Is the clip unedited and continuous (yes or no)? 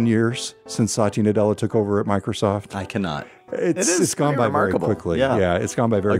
no